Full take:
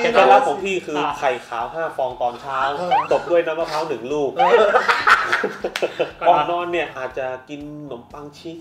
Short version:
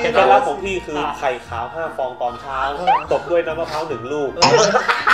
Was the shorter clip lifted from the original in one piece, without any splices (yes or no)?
yes